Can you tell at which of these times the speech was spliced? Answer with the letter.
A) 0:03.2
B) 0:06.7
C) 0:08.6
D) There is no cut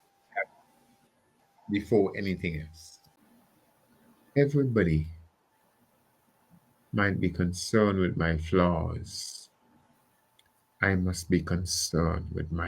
A